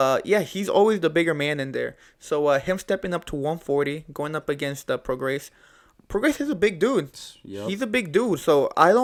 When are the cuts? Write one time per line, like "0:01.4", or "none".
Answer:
none